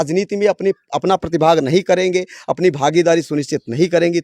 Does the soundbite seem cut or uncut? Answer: uncut